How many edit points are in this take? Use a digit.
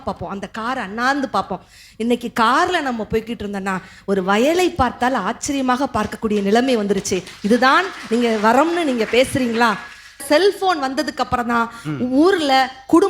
1